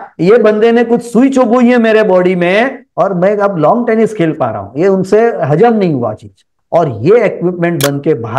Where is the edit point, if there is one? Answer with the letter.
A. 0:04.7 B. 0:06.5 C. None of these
B